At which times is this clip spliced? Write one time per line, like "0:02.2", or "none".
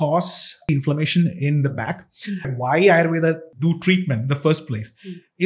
0:00.7
0:02.5
0:03.5